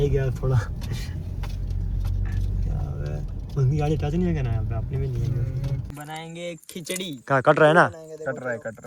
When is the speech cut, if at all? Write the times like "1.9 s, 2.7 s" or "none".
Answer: 5.9 s